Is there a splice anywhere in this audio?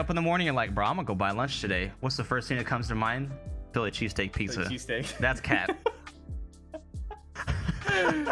no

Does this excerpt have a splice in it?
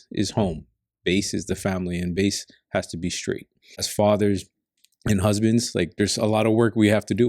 yes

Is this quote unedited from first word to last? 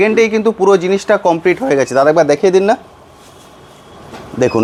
yes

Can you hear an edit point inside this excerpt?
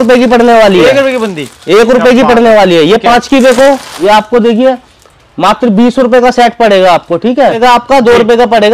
yes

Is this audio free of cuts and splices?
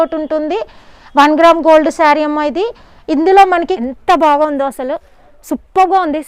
no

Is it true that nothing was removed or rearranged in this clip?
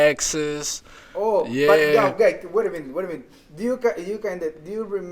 yes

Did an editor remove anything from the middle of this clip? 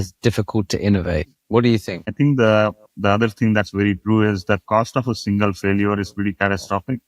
yes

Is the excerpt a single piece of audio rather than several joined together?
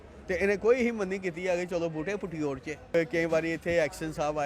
no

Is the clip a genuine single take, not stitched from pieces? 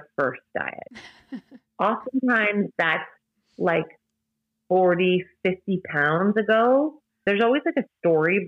no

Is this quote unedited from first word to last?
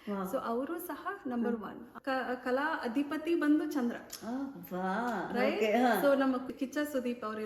no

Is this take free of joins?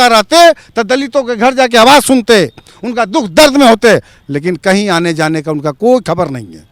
yes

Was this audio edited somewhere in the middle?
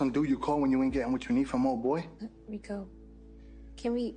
yes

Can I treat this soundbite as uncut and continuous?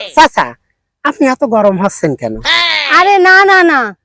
no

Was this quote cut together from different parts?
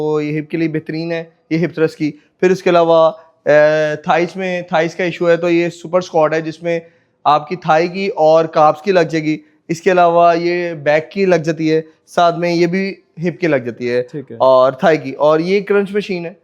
no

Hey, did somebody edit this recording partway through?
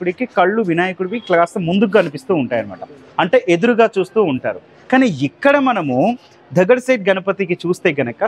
no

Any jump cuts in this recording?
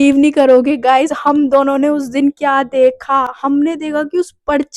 no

